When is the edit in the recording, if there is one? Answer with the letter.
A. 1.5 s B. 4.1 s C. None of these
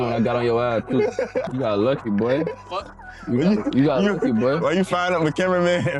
A